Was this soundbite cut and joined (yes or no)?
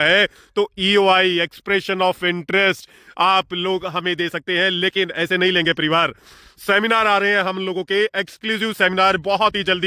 no